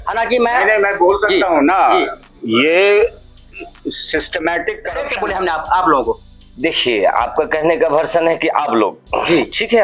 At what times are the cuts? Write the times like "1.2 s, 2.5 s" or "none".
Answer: 5.1 s